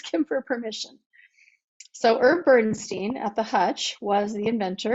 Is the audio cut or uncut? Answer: uncut